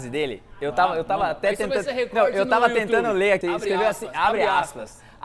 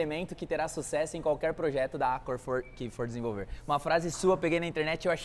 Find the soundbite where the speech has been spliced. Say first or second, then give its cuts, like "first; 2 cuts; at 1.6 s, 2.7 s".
first; 1 cut; at 3.4 s